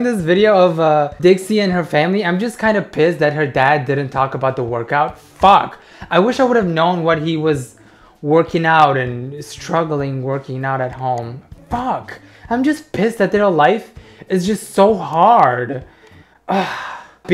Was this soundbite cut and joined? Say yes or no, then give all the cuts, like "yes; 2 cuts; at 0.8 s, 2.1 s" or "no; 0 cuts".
no; 0 cuts